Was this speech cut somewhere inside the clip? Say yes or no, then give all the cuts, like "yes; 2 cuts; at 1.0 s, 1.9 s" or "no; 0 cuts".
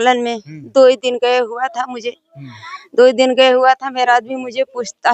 no; 0 cuts